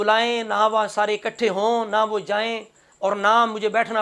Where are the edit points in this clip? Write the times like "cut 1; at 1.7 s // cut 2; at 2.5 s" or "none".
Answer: none

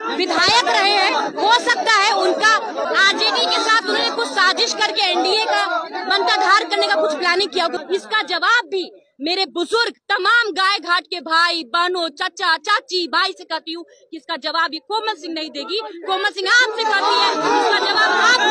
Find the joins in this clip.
cut 1; at 2.8 s // cut 2; at 7.8 s

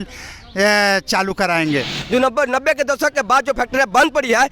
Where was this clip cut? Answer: cut 1; at 2.0 s

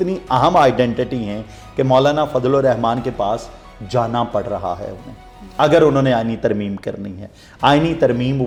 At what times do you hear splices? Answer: none

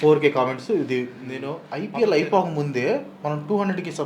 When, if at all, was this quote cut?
cut 1; at 1.6 s

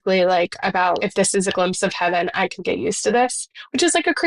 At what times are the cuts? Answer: cut 1; at 1.0 s

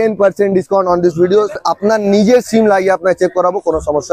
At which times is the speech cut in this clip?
cut 1; at 1.6 s

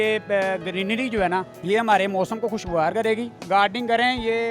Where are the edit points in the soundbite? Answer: cut 1; at 1.5 s // cut 2; at 3.4 s

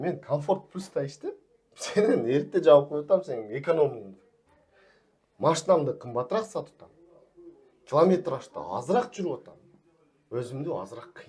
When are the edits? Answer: none

